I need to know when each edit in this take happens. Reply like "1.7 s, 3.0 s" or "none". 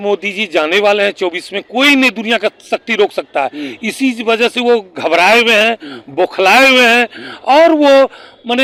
none